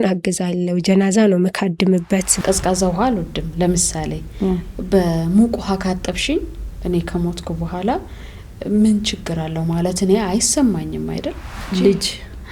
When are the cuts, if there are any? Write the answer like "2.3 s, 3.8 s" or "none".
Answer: 2.3 s, 11.4 s